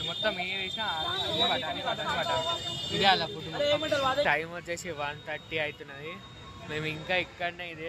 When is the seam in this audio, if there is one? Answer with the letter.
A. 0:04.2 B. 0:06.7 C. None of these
A